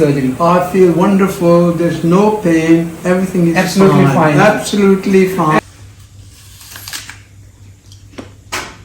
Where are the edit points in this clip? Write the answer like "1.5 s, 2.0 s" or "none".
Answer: 5.6 s